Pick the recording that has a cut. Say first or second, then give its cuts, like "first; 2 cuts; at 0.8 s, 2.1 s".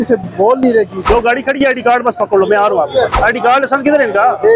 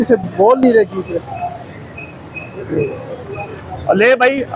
first; 2 cuts; at 1.0 s, 3.1 s